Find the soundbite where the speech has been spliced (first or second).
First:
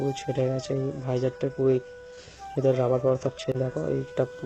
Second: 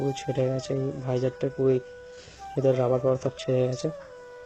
first